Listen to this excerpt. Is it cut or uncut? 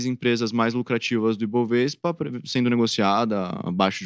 uncut